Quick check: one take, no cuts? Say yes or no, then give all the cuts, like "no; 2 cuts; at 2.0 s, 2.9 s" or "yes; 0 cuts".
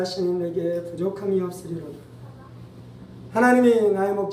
yes; 0 cuts